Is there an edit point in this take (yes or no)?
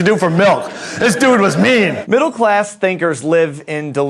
yes